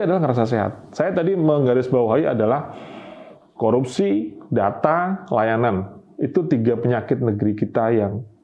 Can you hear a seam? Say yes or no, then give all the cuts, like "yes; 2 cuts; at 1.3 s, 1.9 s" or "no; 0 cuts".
no; 0 cuts